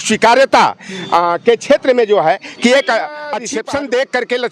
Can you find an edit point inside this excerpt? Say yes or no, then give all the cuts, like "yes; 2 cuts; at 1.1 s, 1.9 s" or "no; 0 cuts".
yes; 1 cut; at 3.2 s